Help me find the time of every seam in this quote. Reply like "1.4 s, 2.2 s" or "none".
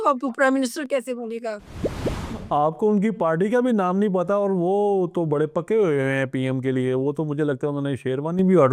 none